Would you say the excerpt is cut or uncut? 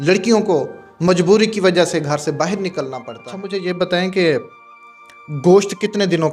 cut